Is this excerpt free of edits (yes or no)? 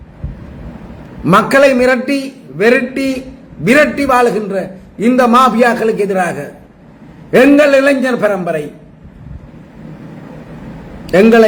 yes